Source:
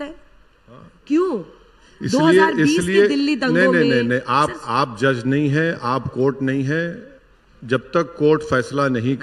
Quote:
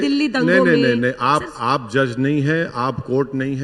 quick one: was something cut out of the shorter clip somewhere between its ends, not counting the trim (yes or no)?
no